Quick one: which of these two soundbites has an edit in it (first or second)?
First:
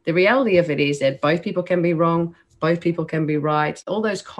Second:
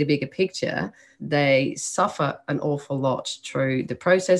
second